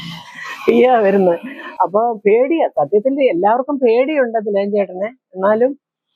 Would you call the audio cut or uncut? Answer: uncut